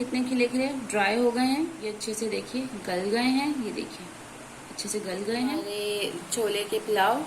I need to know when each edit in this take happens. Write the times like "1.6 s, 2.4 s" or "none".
2.0 s, 5.7 s